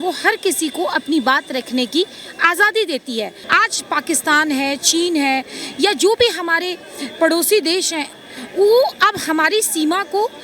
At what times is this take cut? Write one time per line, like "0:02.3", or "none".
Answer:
0:03.4